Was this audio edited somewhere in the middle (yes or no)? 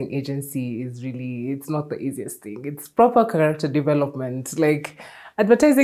no